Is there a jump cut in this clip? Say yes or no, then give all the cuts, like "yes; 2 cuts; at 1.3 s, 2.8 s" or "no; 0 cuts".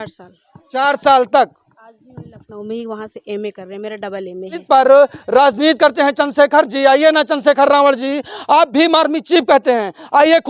yes; 1 cut; at 4.6 s